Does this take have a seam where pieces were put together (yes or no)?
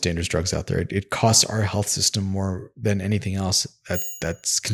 no